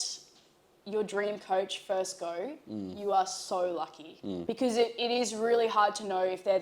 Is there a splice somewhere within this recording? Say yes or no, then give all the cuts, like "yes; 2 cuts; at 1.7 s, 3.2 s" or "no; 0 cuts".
yes; 1 cut; at 4.4 s